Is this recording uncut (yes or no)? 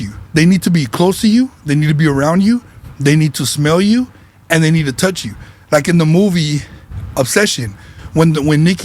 yes